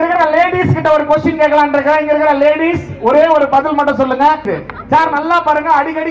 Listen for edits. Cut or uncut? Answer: cut